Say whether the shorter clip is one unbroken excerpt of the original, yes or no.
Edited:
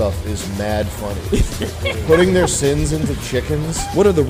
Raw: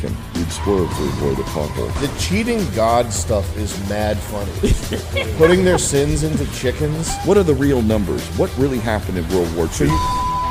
yes